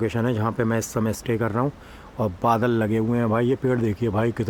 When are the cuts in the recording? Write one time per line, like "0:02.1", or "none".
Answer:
none